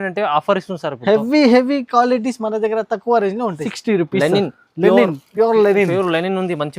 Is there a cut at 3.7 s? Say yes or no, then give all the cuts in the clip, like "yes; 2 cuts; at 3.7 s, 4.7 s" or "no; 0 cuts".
yes; 1 cut; at 3.7 s